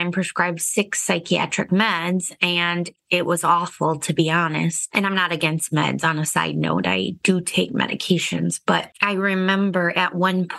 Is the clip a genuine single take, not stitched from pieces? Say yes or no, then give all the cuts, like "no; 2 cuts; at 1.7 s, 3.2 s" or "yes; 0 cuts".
yes; 0 cuts